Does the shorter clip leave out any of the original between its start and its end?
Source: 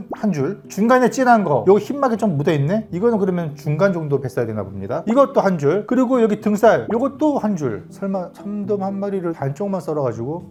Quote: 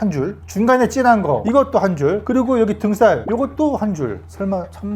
yes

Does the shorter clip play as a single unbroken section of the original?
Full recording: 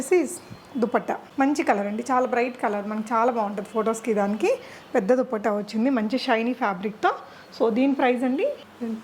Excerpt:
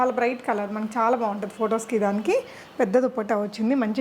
yes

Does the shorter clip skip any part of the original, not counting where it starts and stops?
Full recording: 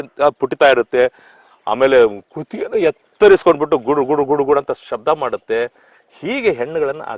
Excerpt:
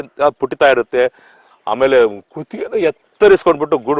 no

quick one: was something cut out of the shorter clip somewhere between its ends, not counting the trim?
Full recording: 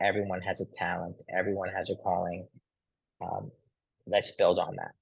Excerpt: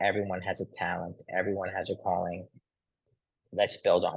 yes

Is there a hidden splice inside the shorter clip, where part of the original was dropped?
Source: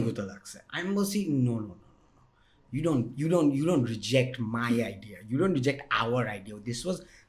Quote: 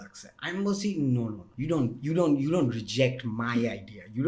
yes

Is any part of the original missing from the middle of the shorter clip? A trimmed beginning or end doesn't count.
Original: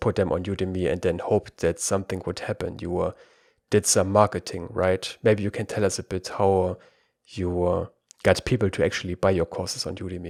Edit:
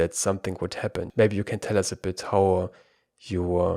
yes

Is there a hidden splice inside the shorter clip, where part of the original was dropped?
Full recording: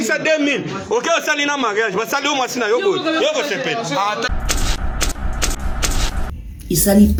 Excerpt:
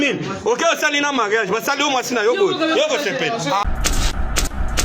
yes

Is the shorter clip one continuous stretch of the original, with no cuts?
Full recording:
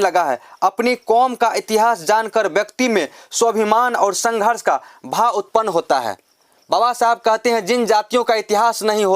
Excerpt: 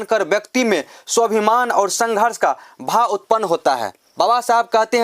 no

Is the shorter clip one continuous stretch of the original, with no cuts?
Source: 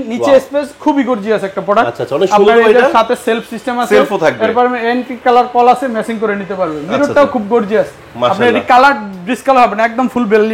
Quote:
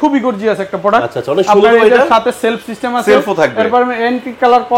yes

